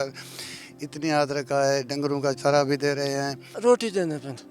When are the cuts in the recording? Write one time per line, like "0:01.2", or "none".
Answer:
0:03.5